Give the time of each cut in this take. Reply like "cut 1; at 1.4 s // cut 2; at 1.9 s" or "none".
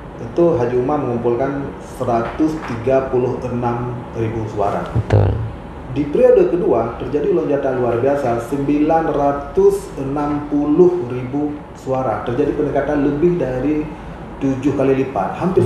none